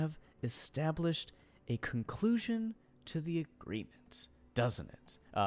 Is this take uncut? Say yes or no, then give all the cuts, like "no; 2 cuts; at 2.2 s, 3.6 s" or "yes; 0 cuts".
yes; 0 cuts